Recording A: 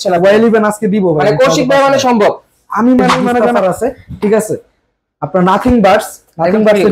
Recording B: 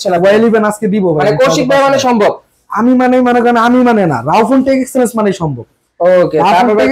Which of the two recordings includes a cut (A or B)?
A